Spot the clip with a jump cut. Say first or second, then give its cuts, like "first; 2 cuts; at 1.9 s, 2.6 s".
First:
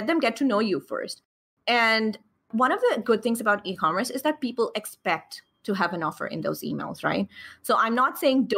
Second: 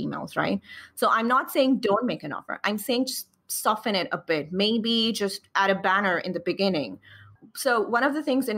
first; 1 cut; at 2.5 s